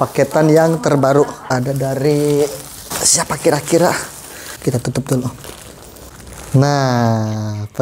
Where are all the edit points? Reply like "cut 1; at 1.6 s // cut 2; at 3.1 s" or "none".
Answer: cut 1; at 1.5 s